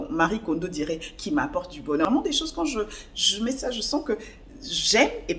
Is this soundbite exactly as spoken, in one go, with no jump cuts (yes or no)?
no